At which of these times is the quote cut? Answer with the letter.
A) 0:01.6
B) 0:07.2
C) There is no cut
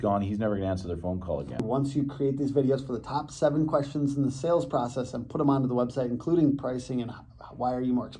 A